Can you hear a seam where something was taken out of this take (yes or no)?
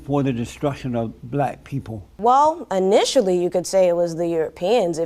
yes